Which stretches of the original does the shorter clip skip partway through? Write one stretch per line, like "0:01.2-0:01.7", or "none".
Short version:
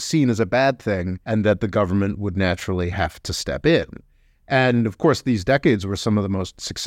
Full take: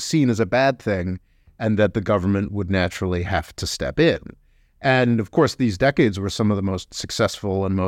0:01.1-0:01.5

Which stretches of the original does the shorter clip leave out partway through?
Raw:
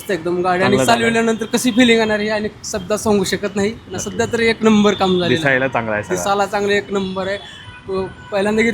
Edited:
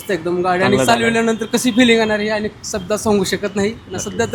none

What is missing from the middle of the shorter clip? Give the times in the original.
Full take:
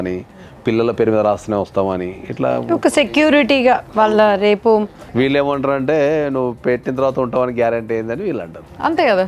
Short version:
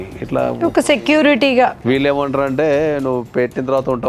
0:03.9-0:05.1

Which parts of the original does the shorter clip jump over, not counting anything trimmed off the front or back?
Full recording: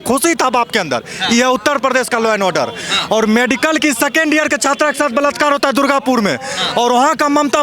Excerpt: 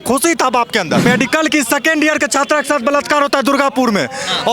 0:01.1-0:03.4

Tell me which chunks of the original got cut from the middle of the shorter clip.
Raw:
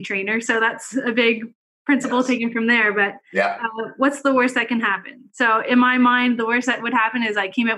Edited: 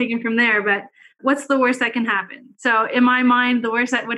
0:03.2-0:03.7

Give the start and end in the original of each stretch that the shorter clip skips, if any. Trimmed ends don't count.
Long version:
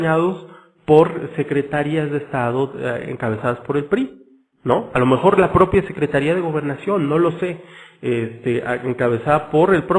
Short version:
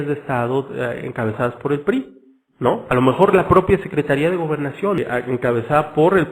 0:07.0-0:08.5

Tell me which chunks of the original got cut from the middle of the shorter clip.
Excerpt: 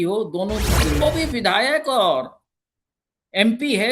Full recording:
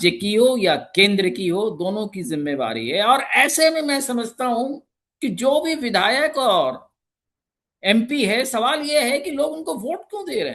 0:02.5-0:05.5

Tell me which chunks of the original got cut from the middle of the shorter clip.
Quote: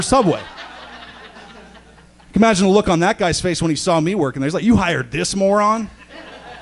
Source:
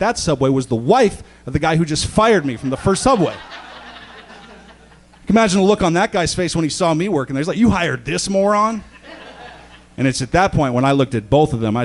none

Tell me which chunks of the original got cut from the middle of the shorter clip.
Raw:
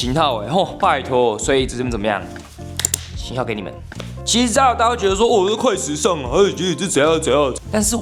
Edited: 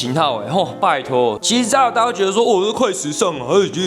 0:01.4-0:04.2

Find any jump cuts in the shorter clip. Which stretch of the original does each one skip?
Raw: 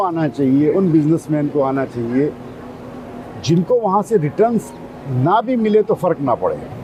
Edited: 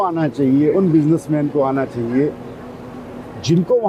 none

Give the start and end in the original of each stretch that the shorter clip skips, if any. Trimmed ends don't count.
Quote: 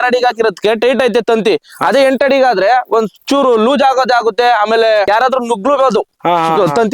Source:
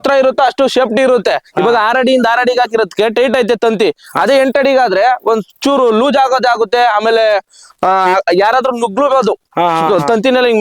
0:07.4-0:08.4

